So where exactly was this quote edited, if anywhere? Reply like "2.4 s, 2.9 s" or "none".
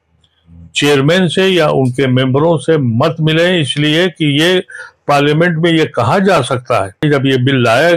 7.0 s